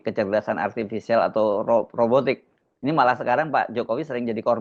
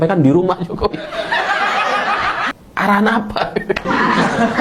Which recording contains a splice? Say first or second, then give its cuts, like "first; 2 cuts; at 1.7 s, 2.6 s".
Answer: second; 1 cut; at 2.5 s